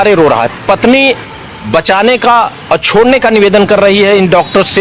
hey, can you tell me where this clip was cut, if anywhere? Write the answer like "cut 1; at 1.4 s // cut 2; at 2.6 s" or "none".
none